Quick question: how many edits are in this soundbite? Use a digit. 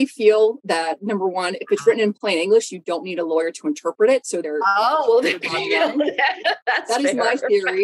1